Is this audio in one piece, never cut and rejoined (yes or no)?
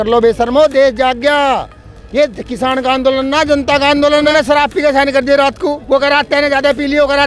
no